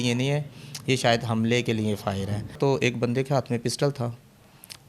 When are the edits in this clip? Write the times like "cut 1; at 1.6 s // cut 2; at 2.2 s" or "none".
cut 1; at 2.6 s